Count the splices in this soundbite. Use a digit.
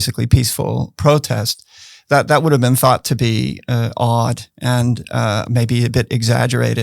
1